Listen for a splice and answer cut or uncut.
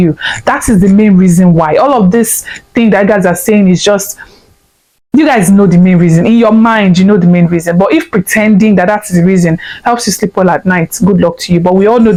uncut